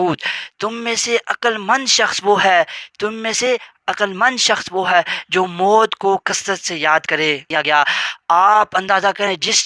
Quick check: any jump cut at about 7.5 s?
yes; 1 cut; at 7.5 s

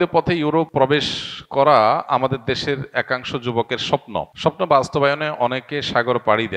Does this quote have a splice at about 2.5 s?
no; 2 cuts; at 1.0 s, 4.3 s

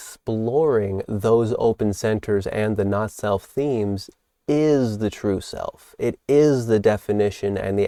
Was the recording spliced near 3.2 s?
no; 0 cuts

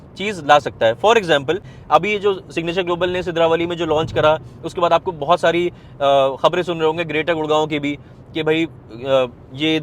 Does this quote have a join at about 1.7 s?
yes; 1 cut; at 1.7 s

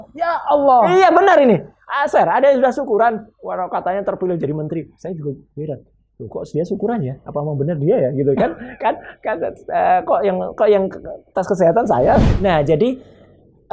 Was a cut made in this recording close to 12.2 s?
yes; 1 cut; at 12.2 s

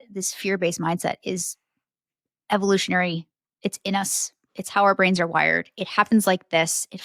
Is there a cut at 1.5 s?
no; 0 cuts

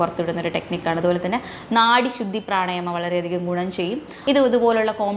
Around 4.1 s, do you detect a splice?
yes; 1 cut; at 4.1 s

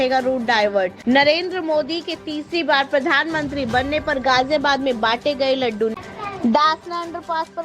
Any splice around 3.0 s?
no; 2 cuts; at 1.0 s, 5.9 s

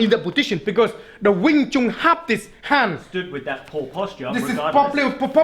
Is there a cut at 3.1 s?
yes; 1 cut; at 3.1 s

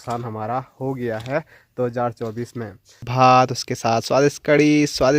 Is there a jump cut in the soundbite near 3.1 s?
yes; 1 cut; at 3.1 s

